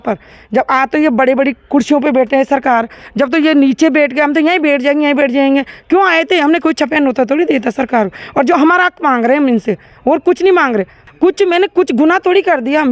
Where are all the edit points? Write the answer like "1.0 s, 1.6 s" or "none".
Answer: 11.0 s